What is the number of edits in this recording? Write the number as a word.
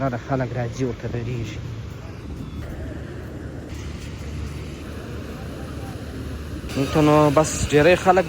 three